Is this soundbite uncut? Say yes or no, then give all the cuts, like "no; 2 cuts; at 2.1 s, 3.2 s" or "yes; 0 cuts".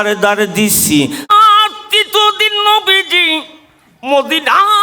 no; 1 cut; at 1.3 s